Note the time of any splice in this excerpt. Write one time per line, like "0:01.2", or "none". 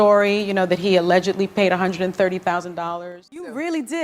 0:02.8